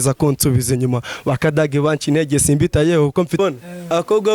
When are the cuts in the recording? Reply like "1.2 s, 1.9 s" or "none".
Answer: 3.4 s